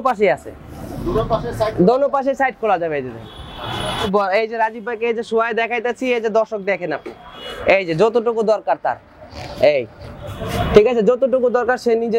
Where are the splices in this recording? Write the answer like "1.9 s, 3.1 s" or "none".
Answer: 4.1 s